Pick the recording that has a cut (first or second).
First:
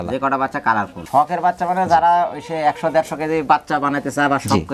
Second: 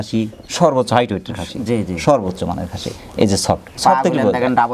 first